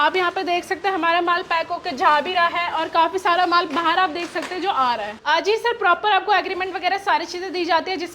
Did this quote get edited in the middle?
yes; 1 cut; at 5.2 s

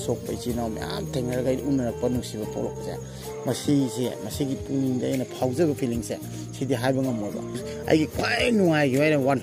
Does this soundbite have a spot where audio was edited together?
yes; 1 cut; at 7.6 s

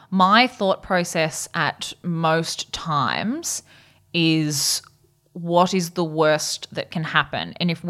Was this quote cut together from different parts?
no; 0 cuts

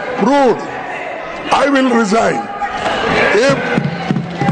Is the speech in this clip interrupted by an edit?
no; 0 cuts

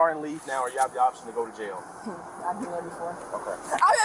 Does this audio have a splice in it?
no; 0 cuts

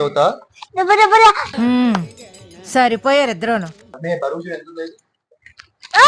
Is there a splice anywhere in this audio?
yes; 2 cuts; at 1.4 s, 3.8 s

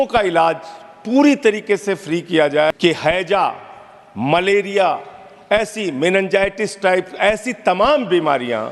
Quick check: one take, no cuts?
no; 1 cut; at 2.7 s

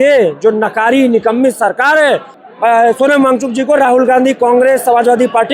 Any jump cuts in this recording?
yes; 1 cut; at 2.3 s

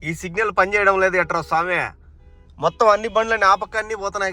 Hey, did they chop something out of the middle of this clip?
no; 0 cuts

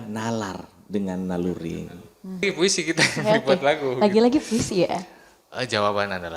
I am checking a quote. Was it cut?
yes; 1 cut; at 2.4 s

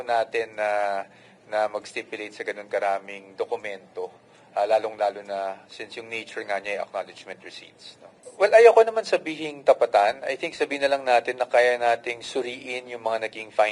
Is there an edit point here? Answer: yes; 1 cut; at 8.2 s

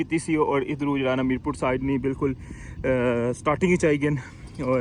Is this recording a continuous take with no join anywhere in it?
yes; 0 cuts

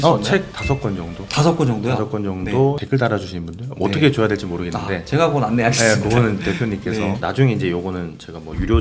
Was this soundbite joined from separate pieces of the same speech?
no; 0 cuts

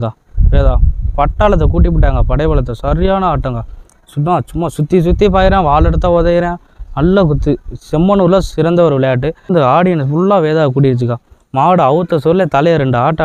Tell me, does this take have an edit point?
yes; 1 cut; at 9.5 s

